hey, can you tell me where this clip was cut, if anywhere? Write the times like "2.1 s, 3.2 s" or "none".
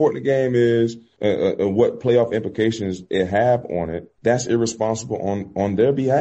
1.0 s, 4.0 s

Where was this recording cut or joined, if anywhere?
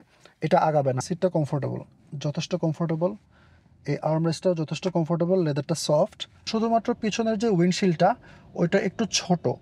1.0 s, 6.5 s

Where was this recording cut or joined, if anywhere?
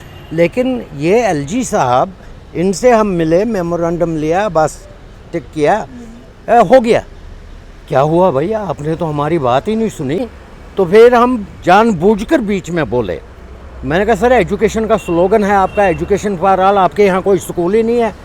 10.2 s

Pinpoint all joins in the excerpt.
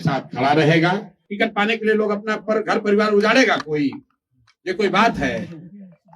1.2 s

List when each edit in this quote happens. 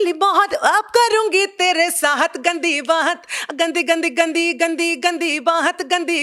none

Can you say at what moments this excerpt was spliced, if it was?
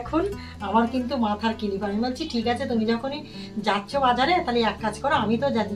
none

